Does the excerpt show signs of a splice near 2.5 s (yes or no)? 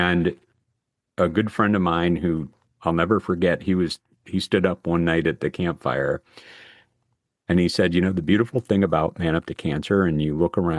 yes